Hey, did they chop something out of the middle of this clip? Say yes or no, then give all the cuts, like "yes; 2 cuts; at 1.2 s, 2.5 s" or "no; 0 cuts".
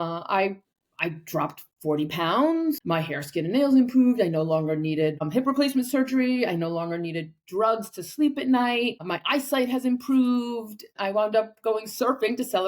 yes; 4 cuts; at 2.8 s, 5.3 s, 9.1 s, 10.9 s